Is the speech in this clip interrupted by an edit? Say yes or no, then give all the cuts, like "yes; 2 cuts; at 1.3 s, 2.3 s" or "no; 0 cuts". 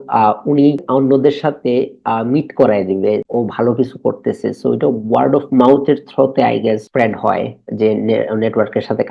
yes; 3 cuts; at 0.8 s, 3.2 s, 6.9 s